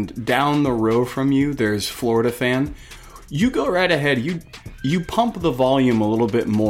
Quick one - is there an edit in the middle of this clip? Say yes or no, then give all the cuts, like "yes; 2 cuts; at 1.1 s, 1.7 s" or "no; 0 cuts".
no; 0 cuts